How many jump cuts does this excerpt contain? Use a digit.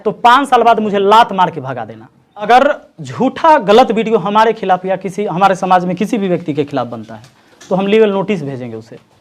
1